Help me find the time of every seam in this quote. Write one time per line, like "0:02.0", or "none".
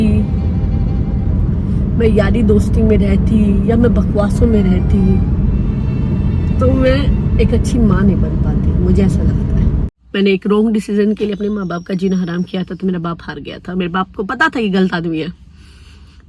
0:09.8